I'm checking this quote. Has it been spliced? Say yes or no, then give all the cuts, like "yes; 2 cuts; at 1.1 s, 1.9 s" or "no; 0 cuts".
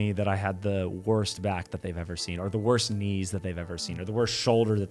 no; 0 cuts